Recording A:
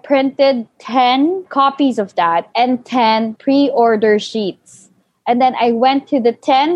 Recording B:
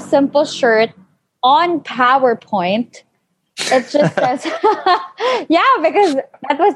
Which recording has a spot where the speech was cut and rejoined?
A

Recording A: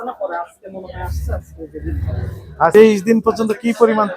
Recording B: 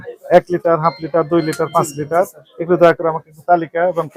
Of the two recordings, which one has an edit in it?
A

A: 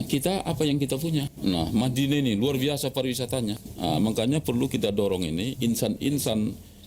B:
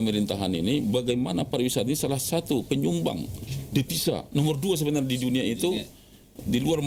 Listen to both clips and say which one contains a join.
A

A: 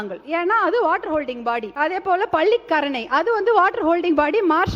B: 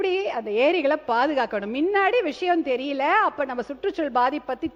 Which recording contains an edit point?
A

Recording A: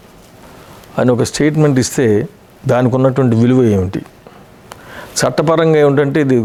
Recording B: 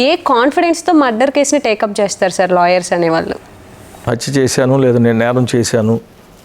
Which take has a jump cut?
B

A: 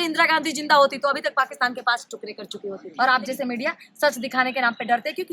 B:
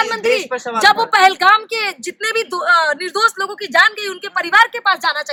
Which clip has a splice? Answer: A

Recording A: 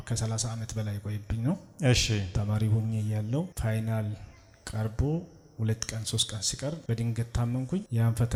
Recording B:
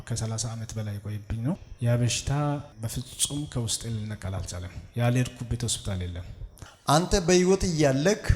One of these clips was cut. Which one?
B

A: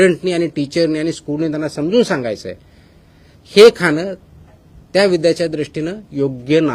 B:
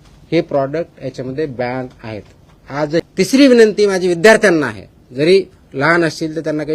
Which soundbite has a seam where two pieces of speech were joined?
B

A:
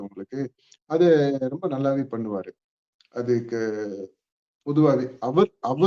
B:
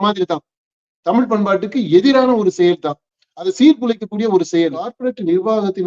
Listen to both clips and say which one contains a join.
B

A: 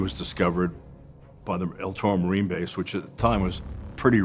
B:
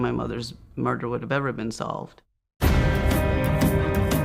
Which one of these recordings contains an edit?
B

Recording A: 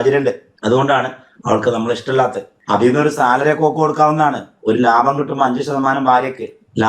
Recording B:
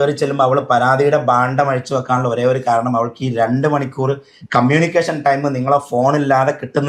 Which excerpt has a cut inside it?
A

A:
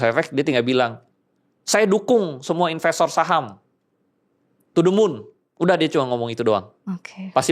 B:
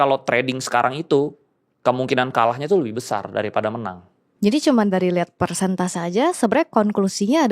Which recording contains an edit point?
B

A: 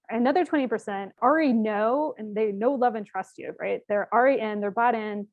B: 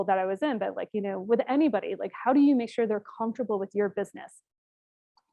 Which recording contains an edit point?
A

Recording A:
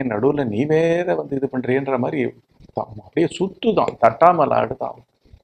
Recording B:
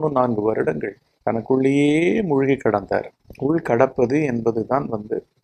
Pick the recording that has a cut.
B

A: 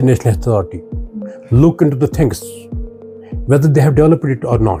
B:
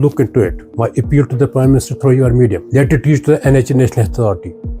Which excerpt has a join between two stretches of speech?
B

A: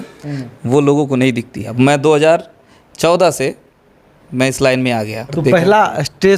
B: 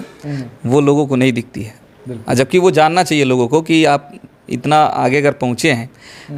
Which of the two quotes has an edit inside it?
A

